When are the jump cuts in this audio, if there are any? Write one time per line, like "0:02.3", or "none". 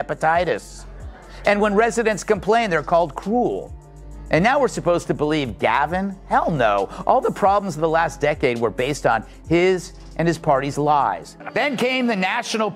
0:11.3